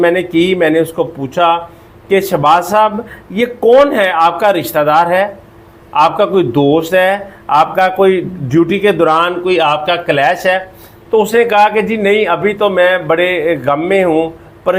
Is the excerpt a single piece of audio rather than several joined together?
yes; 0 cuts

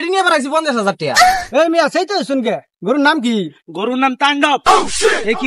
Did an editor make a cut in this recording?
yes; 1 cut; at 1.4 s

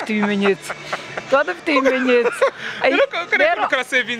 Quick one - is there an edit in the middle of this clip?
no; 0 cuts

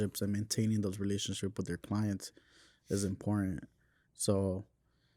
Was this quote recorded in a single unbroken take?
yes; 0 cuts

